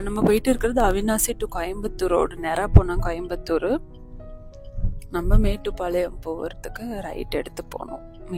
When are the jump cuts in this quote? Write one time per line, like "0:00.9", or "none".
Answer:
none